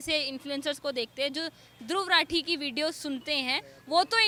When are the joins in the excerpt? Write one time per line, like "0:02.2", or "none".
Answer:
none